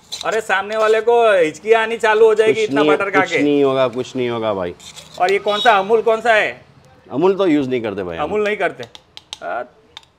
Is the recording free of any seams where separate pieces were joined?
yes; 0 cuts

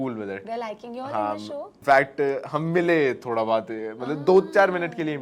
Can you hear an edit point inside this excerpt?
yes; 1 cut; at 1.8 s

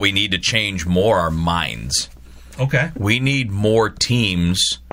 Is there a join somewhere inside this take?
no; 0 cuts

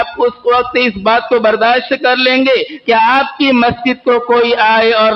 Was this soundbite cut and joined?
no; 0 cuts

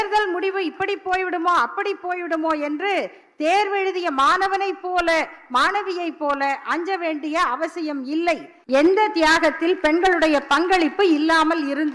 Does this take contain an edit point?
yes; 1 cut; at 8.5 s

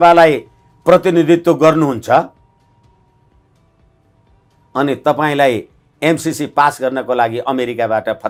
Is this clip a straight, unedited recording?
yes; 0 cuts

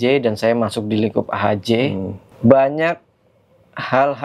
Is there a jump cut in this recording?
yes; 1 cut; at 2.2 s

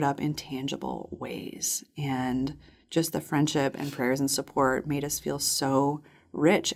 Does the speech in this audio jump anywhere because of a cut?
no; 0 cuts

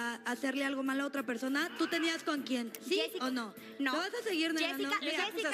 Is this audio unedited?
yes; 0 cuts

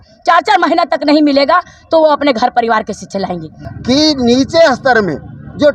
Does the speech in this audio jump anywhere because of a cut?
yes; 1 cut; at 3.6 s

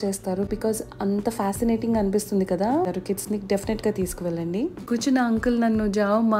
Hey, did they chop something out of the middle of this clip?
yes; 2 cuts; at 2.9 s, 4.9 s

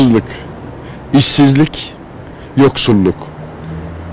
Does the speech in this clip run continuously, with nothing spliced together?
yes; 0 cuts

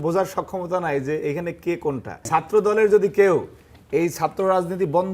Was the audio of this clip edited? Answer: yes; 1 cut; at 2.1 s

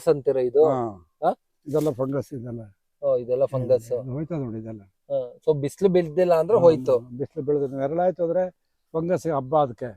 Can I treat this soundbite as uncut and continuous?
yes; 0 cuts

